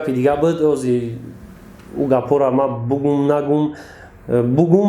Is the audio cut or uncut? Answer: uncut